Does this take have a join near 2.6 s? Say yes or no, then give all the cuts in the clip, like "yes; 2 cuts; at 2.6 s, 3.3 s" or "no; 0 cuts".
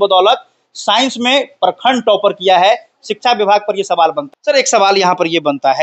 no; 1 cut; at 4.2 s